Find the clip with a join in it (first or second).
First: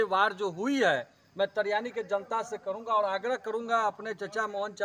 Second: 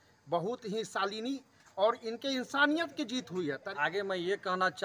second